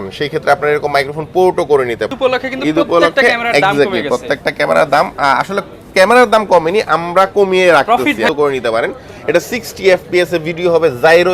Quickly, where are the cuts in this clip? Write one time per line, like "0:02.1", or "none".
0:02.1
0:08.3